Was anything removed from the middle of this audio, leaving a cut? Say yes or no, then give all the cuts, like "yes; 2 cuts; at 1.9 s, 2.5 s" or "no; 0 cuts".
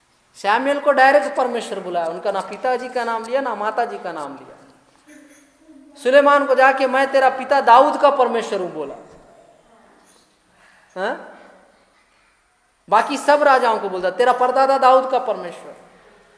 no; 0 cuts